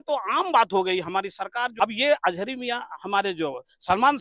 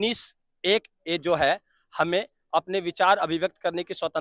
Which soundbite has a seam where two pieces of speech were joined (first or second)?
first